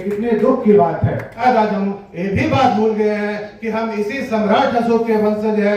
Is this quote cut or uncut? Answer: cut